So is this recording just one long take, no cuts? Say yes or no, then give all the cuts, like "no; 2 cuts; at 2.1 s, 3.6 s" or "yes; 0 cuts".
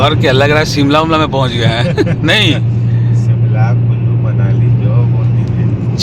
yes; 0 cuts